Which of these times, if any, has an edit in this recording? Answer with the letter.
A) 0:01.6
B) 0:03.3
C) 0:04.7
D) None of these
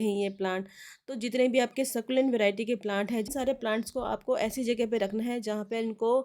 B